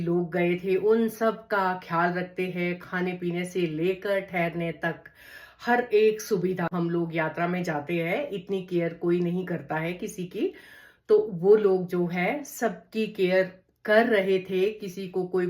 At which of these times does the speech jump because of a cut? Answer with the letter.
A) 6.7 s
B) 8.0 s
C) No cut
A